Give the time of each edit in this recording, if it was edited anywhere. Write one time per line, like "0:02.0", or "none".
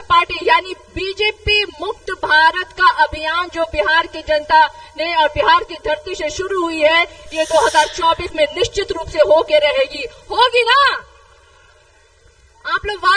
none

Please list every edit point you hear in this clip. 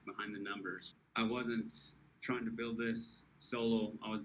0:00.9

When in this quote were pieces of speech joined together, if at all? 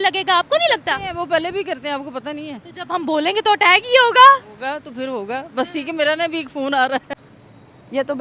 0:07.1

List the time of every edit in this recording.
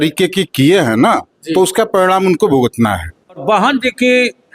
0:03.4

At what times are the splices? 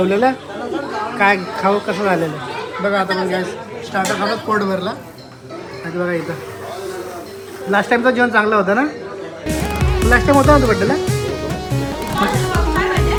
none

